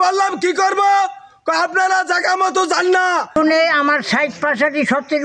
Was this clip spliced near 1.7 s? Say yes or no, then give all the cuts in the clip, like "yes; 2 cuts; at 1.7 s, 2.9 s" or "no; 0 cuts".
no; 1 cut; at 3.4 s